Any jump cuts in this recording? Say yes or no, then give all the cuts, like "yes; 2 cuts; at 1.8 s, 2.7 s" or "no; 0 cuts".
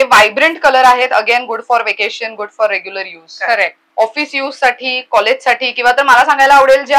yes; 1 cut; at 3.8 s